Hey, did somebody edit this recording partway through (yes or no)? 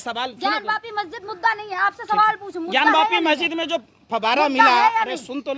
no